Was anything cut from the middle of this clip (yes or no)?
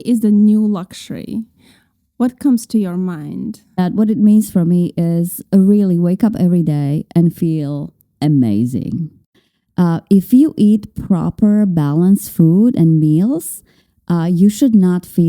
yes